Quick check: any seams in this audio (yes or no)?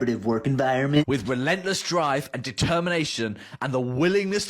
yes